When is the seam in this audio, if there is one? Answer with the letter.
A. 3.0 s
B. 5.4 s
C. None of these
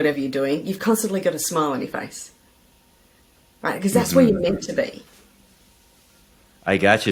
C